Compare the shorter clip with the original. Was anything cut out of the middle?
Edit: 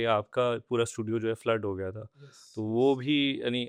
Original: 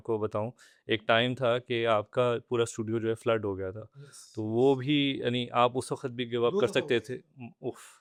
no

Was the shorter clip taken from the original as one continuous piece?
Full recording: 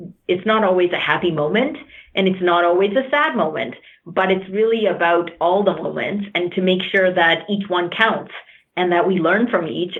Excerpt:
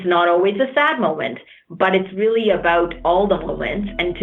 yes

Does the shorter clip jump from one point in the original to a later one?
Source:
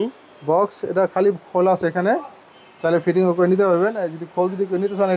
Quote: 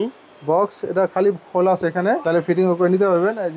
yes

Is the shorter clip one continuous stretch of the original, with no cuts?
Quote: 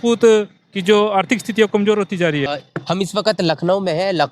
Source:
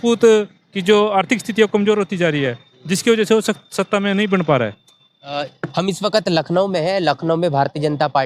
no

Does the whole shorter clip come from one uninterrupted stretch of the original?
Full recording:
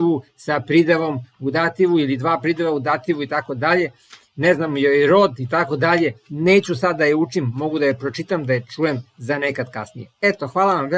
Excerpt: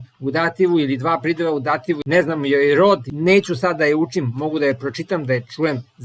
no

